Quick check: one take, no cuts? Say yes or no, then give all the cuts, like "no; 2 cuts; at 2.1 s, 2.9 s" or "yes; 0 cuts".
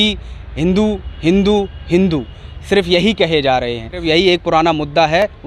no; 1 cut; at 4.0 s